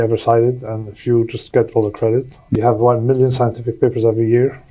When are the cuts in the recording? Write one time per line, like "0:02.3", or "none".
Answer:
0:02.5